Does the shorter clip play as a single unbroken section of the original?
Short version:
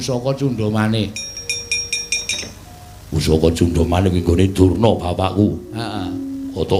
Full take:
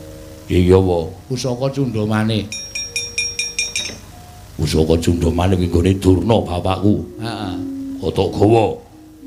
no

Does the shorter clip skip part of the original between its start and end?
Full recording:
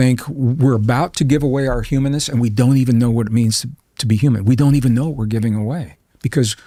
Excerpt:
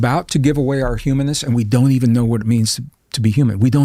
no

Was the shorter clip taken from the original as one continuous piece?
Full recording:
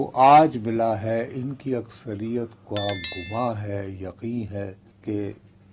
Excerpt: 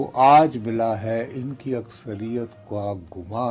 yes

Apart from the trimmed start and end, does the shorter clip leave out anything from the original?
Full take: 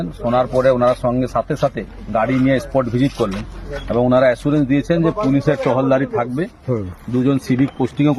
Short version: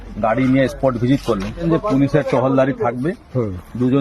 yes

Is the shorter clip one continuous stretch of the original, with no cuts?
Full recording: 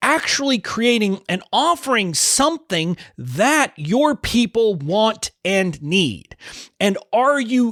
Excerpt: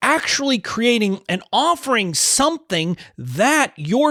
yes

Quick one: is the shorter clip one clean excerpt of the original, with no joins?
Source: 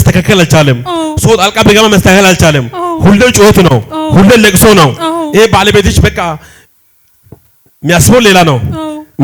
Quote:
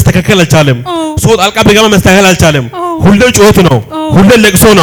yes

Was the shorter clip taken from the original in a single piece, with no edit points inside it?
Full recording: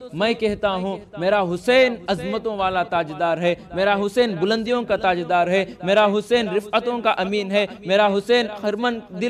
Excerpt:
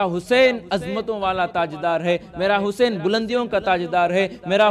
yes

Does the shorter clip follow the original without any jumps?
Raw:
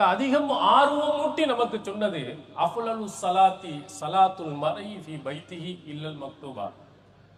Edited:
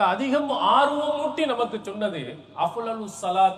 yes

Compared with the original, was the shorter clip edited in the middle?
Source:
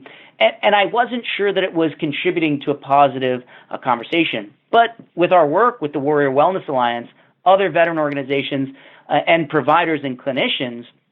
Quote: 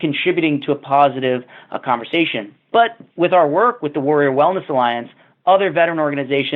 no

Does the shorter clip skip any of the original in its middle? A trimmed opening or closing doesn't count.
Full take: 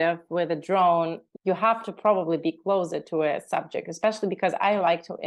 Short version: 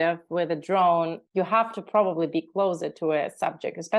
yes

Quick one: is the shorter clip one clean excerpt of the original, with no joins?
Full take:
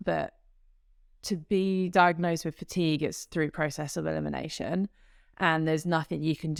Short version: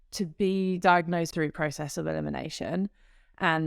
no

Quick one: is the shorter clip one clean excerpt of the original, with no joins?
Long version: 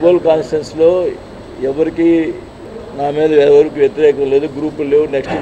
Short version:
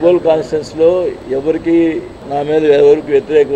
no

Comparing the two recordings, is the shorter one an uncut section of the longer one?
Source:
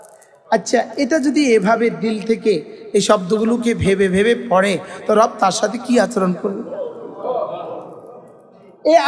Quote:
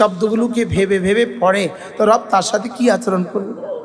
yes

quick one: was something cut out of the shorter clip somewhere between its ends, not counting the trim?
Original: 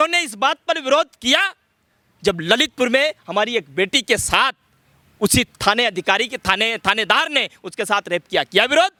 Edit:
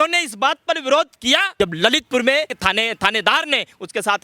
yes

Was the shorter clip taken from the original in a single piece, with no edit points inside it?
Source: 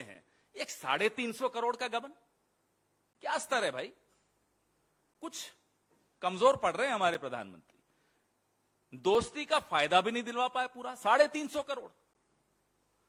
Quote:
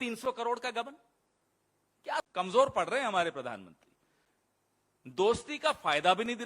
no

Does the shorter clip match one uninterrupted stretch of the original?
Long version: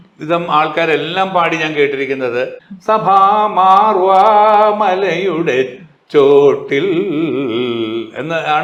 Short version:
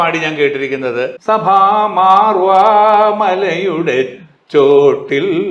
no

